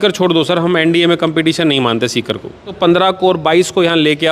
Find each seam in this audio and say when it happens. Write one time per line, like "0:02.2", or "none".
0:02.7